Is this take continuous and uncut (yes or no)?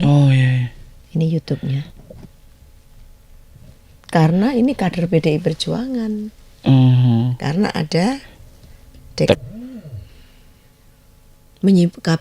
no